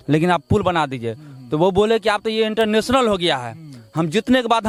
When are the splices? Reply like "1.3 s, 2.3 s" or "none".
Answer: none